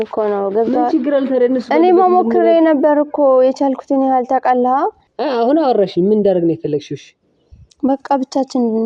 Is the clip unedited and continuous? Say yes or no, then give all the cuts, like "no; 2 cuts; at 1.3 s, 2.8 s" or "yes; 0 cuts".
no; 1 cut; at 5.1 s